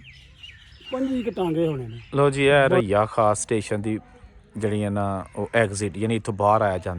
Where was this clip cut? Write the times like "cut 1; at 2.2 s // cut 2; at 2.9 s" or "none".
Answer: cut 1; at 1.9 s